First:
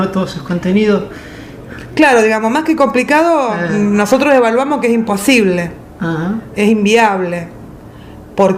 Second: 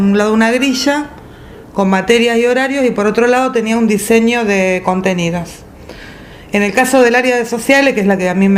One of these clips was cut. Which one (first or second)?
second